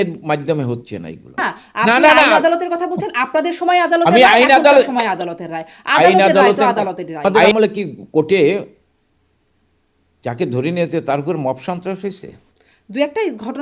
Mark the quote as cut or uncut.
cut